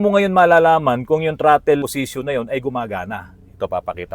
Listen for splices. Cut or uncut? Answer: cut